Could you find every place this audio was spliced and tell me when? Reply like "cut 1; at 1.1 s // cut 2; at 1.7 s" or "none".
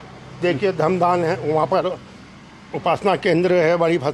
none

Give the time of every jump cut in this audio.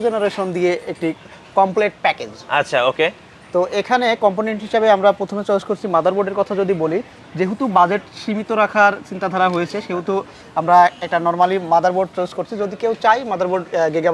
none

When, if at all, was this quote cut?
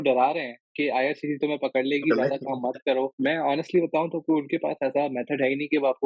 cut 1; at 3.1 s

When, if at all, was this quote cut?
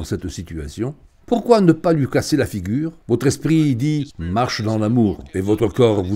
cut 1; at 3.0 s

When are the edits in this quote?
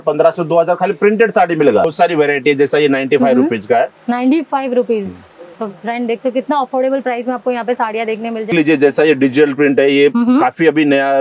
cut 1; at 1.9 s // cut 2; at 8.5 s

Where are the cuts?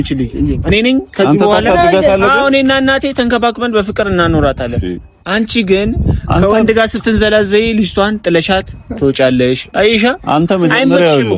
none

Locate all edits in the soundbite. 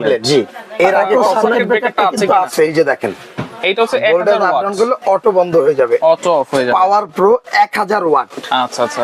cut 1; at 1.0 s

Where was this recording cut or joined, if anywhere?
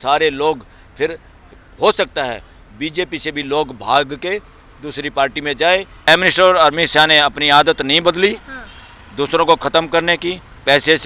cut 1; at 6.0 s

